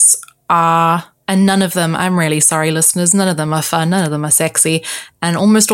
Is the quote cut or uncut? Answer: cut